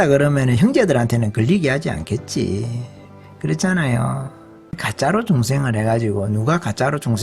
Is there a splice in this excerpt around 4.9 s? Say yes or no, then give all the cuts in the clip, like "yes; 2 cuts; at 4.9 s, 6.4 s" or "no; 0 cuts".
yes; 1 cut; at 4.9 s